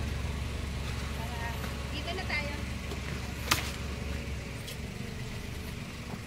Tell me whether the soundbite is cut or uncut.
uncut